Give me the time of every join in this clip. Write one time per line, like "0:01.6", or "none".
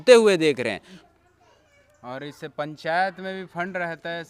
0:01.0